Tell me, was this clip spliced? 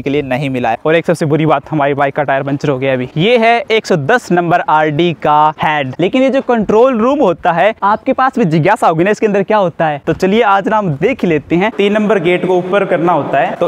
yes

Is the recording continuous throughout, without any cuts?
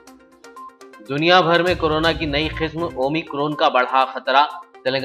no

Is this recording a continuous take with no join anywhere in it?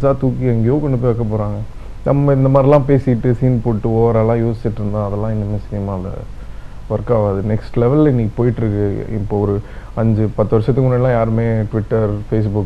yes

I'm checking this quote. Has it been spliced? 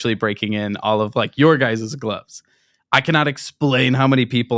no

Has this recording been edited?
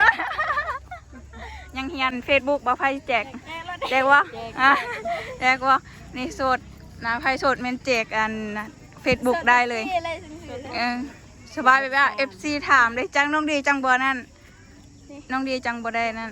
yes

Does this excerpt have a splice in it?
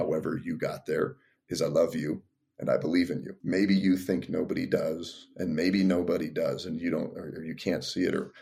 yes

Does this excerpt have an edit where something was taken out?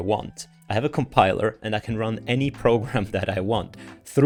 no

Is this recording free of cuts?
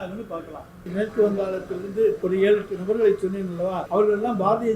no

